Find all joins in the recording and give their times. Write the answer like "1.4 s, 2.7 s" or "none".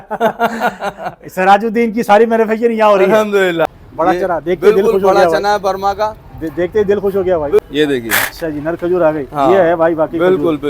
3.6 s, 7.7 s